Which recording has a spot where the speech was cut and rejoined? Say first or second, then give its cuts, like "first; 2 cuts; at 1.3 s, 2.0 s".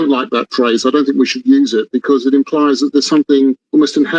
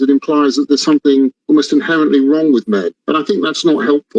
second; 1 cut; at 3.0 s